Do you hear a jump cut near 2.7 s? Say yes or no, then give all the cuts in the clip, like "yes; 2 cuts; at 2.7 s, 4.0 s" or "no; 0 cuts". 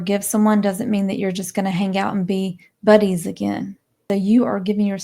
no; 1 cut; at 4.0 s